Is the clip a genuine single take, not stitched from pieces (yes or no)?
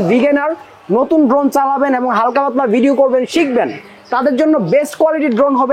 yes